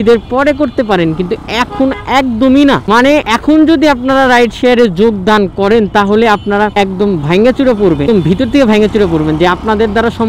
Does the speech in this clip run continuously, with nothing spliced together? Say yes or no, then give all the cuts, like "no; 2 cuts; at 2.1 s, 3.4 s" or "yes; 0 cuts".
no; 1 cut; at 8.0 s